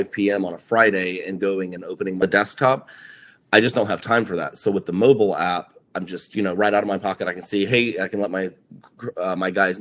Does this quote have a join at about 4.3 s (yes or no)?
no